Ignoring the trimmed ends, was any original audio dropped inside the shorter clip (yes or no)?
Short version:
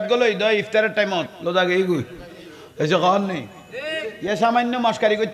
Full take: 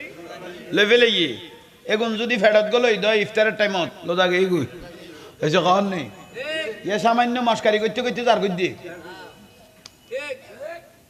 no